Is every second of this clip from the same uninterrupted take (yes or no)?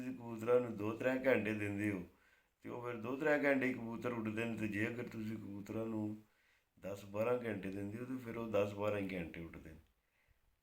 yes